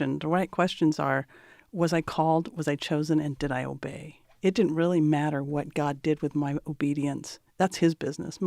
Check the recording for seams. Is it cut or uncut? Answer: uncut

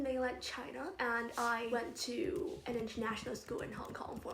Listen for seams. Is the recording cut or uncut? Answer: cut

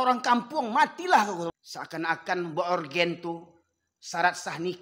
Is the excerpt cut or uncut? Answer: cut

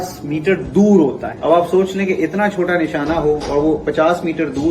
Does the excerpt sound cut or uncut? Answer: cut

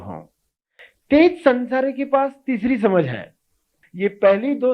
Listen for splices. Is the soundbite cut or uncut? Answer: cut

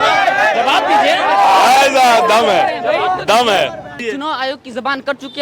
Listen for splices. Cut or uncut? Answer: cut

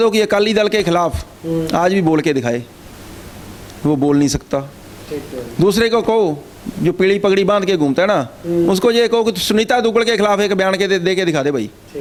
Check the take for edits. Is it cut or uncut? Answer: uncut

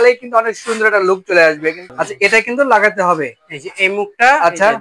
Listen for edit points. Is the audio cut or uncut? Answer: cut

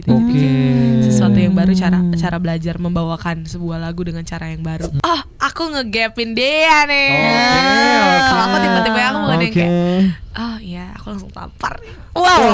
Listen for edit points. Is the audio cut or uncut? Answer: cut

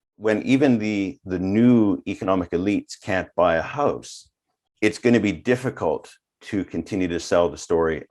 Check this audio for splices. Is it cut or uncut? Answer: uncut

